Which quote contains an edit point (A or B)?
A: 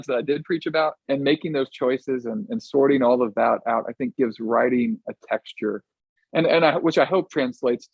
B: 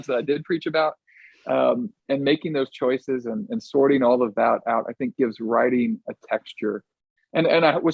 A